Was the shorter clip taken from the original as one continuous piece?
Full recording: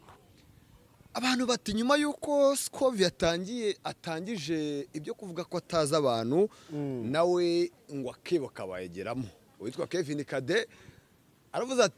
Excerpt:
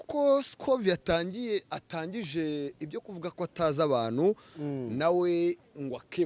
yes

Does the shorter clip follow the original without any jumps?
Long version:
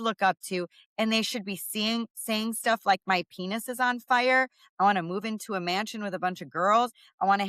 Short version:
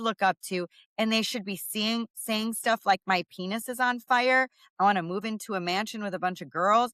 yes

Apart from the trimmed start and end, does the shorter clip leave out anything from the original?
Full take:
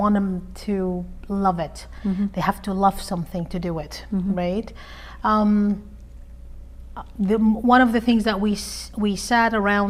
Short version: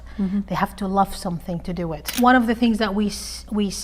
yes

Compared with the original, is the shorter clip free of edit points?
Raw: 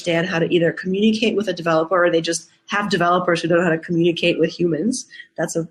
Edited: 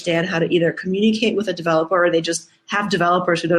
yes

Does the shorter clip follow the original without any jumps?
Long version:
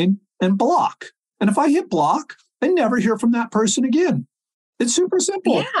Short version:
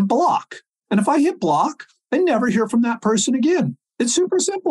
no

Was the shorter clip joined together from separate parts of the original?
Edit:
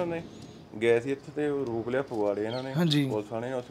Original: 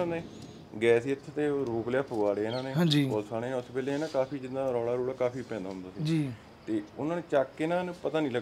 no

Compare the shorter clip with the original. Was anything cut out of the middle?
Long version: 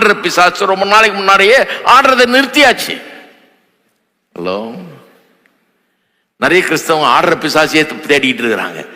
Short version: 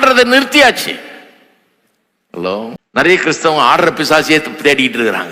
yes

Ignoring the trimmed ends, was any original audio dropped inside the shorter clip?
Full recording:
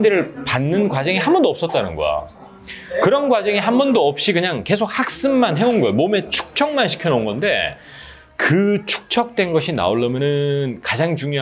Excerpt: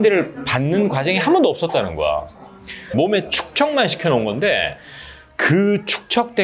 yes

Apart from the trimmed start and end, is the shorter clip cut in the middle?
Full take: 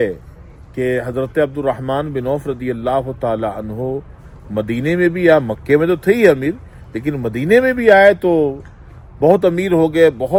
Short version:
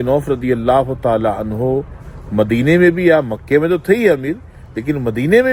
no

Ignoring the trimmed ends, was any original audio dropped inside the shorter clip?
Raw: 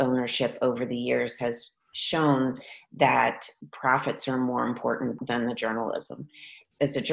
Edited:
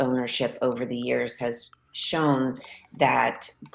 no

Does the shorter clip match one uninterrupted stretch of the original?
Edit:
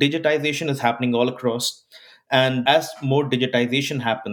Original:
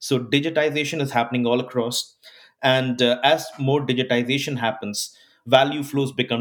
no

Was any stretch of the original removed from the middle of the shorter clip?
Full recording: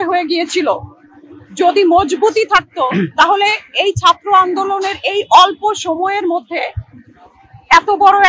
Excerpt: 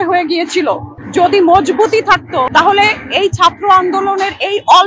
yes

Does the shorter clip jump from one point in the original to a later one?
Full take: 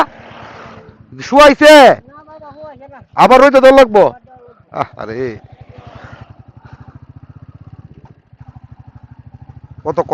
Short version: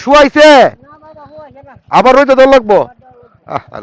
no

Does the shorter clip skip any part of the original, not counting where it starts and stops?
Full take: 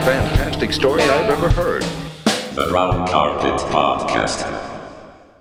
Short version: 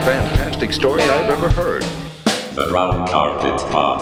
no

